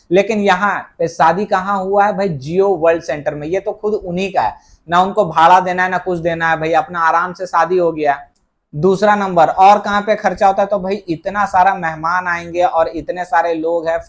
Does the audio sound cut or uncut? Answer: uncut